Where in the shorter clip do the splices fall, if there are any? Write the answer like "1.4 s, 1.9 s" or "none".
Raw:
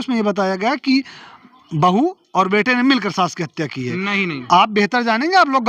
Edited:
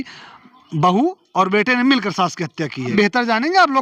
2.9 s